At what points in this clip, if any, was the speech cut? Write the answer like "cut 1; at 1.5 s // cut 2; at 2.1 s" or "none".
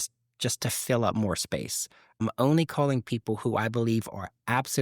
cut 1; at 2.2 s